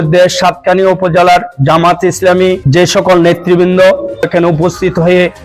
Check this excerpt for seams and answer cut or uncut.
cut